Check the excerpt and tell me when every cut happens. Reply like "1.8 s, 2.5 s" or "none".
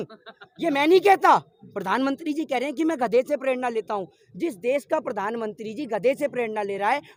none